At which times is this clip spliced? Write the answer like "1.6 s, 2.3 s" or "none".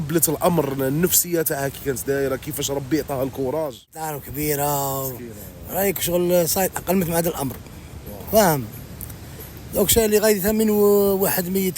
4.2 s

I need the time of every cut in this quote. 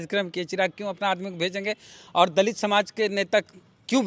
none

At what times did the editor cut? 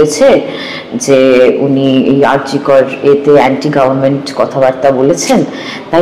none

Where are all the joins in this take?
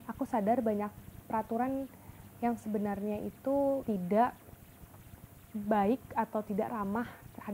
3.8 s

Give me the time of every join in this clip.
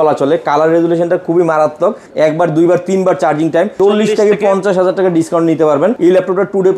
2.0 s, 3.7 s, 6.0 s

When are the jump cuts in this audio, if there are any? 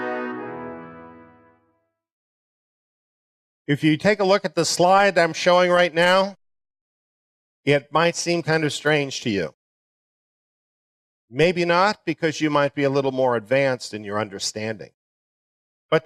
8.2 s

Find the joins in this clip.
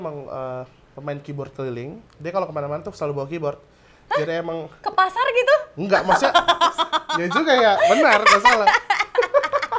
2.0 s

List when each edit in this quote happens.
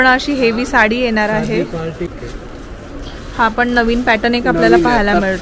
2.1 s

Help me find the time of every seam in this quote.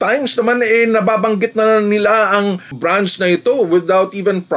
none

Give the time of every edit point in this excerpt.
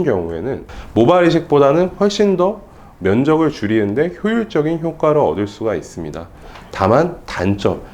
6.4 s

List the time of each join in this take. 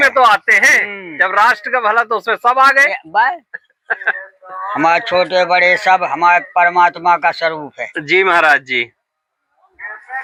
none

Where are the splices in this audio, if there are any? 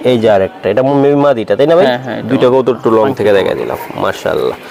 none

